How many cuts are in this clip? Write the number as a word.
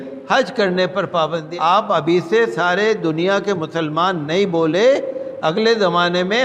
one